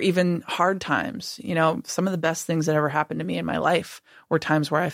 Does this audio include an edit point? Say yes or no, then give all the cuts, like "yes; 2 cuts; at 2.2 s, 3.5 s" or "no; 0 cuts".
no; 0 cuts